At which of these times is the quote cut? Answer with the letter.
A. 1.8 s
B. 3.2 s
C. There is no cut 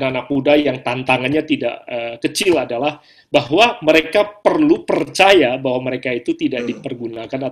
C